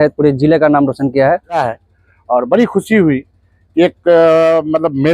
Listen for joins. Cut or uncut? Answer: cut